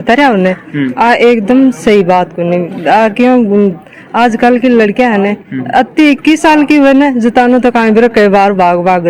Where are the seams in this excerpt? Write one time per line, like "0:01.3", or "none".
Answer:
none